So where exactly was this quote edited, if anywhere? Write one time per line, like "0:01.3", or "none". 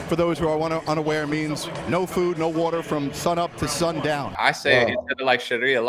0:04.4